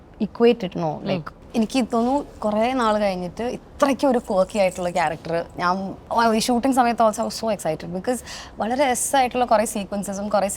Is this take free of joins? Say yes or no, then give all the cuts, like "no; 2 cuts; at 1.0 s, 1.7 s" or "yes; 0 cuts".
no; 1 cut; at 1.4 s